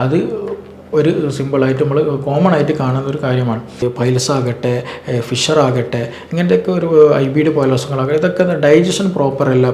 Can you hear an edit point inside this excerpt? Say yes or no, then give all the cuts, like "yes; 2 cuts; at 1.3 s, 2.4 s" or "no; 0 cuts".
yes; 1 cut; at 3.8 s